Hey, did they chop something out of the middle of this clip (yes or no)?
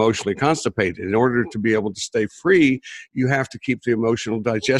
no